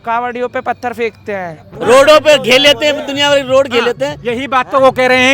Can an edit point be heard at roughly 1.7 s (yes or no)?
yes